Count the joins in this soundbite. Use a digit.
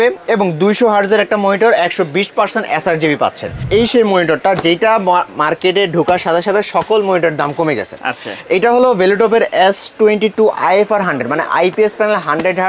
1